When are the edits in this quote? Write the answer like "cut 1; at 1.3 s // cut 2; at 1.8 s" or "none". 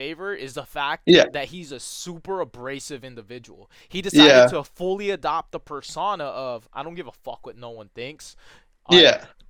none